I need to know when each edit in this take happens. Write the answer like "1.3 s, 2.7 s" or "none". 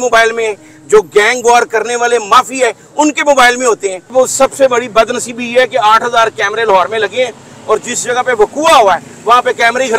4.1 s